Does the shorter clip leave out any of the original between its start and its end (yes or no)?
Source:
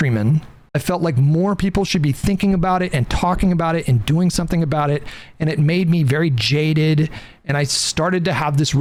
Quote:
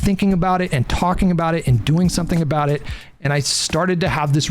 yes